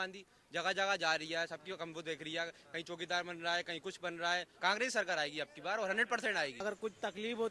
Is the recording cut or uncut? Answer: cut